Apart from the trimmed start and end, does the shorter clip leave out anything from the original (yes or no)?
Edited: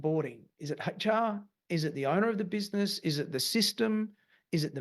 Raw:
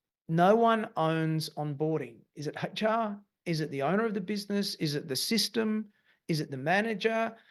no